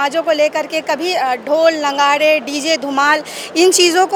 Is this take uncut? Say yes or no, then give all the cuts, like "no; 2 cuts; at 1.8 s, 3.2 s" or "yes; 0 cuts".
yes; 0 cuts